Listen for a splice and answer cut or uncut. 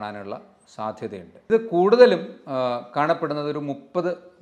cut